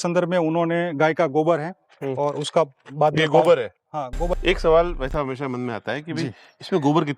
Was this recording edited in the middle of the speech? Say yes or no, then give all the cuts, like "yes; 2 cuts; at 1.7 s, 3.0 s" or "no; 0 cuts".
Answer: yes; 1 cut; at 4.3 s